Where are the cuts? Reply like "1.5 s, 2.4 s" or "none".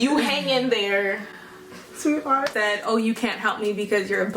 2.5 s